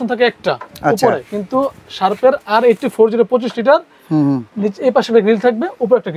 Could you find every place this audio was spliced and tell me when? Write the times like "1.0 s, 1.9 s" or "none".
none